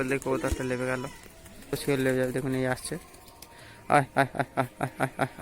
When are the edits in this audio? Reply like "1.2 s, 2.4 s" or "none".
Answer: 1.7 s